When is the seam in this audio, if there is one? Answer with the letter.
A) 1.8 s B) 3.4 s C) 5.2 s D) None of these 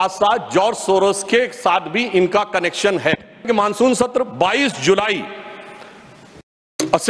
B